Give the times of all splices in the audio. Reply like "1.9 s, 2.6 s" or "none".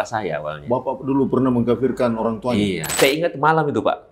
2.9 s